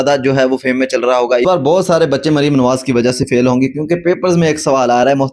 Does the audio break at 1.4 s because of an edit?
yes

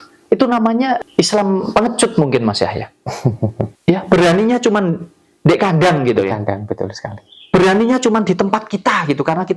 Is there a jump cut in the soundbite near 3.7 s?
yes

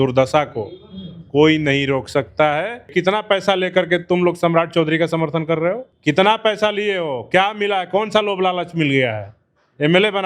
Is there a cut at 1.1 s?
no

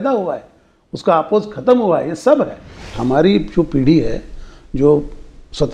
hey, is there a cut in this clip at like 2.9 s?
yes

